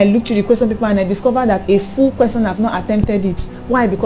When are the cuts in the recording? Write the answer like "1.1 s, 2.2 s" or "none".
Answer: none